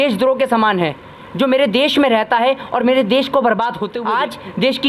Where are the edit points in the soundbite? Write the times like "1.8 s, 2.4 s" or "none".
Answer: 3.9 s